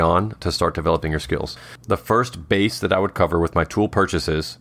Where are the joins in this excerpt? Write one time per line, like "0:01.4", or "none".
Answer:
0:01.7